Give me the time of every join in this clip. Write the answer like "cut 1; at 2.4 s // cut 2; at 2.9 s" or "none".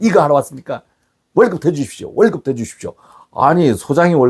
none